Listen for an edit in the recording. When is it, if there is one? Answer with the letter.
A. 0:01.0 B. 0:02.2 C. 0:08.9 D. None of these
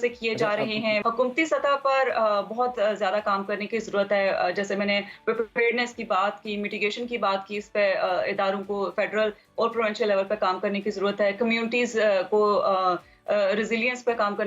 A